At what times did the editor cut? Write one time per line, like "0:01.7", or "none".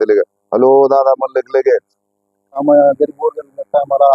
0:02.6